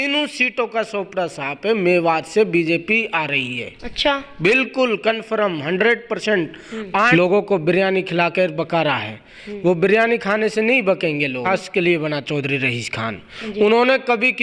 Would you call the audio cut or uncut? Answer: cut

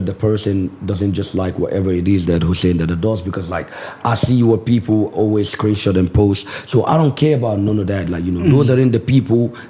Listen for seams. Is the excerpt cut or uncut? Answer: uncut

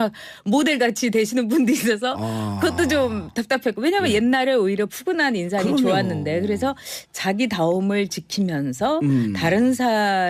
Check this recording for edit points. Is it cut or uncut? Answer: uncut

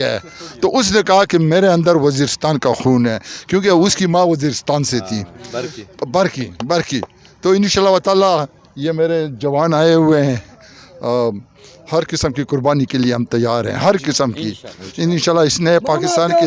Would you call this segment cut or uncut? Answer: uncut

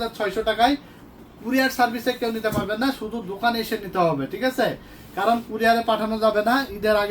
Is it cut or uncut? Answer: uncut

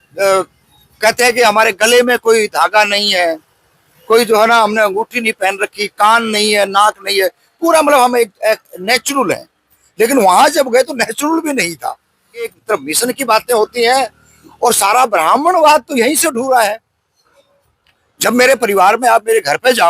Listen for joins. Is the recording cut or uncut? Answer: cut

